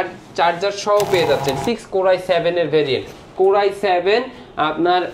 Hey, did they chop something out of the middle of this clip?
yes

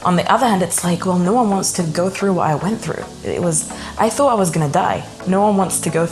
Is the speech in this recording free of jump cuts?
no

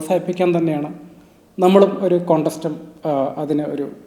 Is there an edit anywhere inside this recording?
no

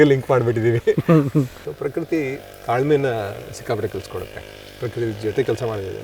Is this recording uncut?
no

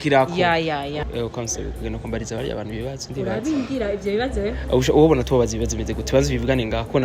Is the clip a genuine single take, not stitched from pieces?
no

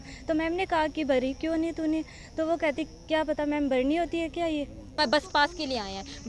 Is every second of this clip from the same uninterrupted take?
no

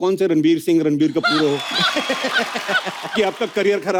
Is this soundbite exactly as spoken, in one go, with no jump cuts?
yes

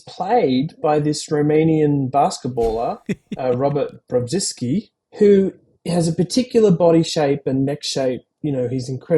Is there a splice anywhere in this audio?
yes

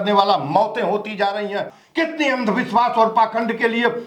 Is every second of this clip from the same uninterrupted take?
no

